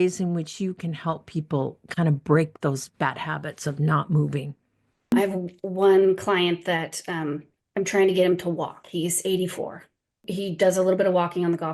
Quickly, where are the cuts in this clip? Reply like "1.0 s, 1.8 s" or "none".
5.1 s, 10.2 s